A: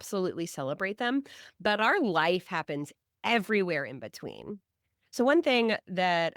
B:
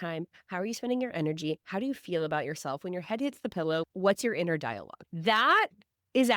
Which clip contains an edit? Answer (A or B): B